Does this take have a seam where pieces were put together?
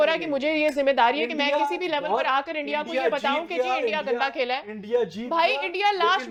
no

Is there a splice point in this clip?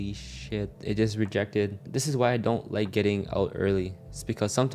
no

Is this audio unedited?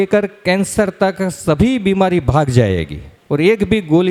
yes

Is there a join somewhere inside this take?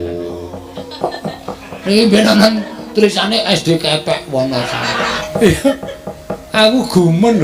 yes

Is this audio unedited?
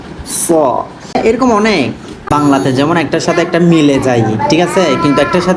no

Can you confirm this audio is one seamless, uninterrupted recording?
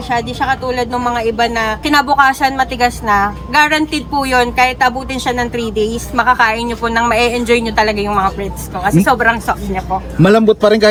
yes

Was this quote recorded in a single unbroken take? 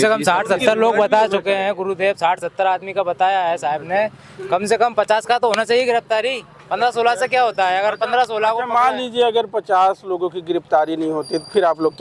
yes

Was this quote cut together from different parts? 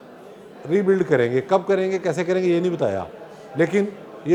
no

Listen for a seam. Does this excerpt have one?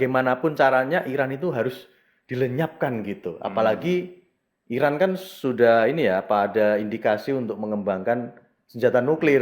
no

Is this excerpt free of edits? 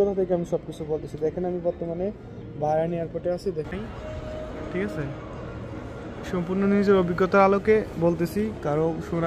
no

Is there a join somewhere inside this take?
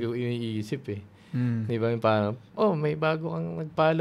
no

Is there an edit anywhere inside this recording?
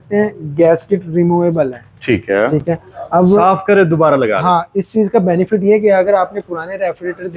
no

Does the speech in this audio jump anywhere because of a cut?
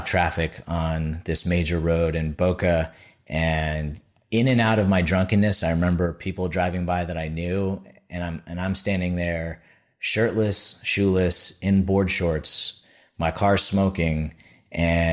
no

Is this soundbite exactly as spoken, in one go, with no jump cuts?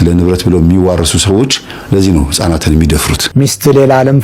no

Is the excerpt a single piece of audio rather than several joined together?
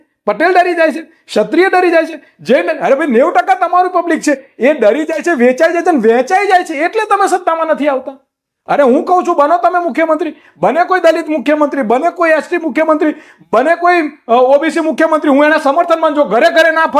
yes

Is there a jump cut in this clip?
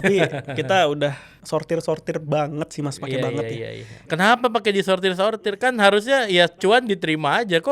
yes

